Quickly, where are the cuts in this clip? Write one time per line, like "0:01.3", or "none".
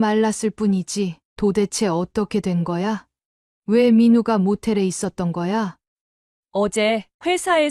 0:01.2
0:05.8